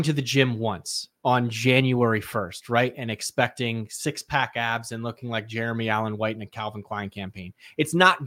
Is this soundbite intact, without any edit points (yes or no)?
yes